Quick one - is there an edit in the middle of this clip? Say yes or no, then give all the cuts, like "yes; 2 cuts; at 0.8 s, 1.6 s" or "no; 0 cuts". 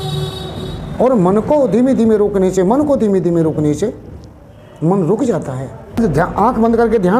yes; 1 cut; at 6.0 s